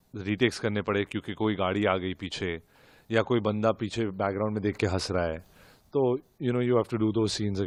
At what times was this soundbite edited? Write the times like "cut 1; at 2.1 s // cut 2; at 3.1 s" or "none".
none